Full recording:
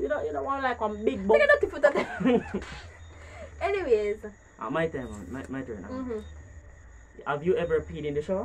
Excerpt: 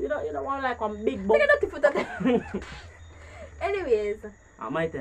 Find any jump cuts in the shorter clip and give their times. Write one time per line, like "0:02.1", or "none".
none